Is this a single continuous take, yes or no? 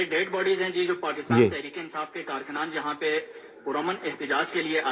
yes